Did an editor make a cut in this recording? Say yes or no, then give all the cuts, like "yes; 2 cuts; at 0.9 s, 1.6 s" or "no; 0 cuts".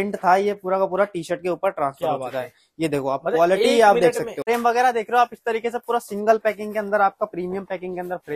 yes; 1 cut; at 4.7 s